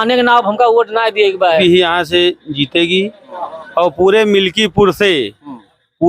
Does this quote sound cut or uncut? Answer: cut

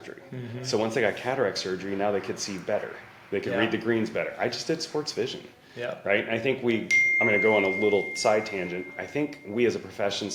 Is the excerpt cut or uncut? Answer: uncut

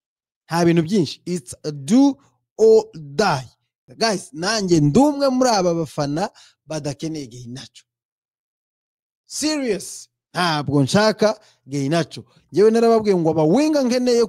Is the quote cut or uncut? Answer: cut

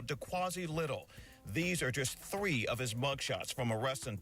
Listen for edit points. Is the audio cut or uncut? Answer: cut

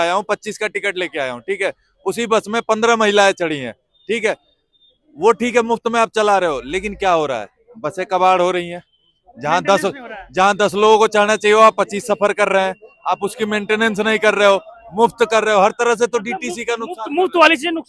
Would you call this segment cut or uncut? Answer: uncut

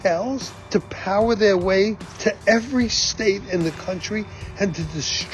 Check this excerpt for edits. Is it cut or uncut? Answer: uncut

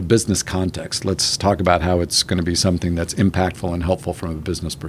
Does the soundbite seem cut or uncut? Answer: uncut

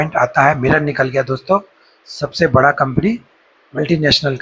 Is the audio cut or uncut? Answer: uncut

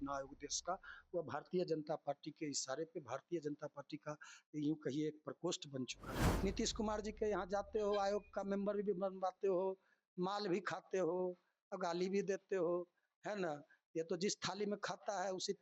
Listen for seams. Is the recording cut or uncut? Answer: cut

